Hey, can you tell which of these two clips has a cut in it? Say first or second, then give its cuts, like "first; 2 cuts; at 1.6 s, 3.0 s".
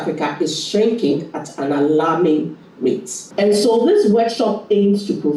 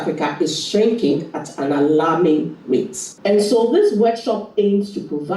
second; 1 cut; at 2.5 s